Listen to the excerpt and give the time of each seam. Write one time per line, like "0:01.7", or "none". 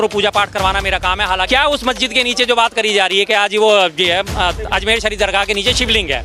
0:01.5